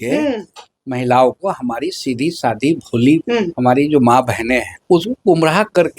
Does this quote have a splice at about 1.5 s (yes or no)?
no